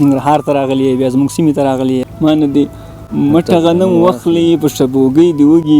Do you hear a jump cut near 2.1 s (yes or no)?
yes